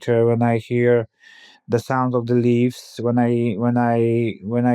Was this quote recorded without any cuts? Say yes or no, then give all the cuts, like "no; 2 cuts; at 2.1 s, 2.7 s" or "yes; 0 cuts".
yes; 0 cuts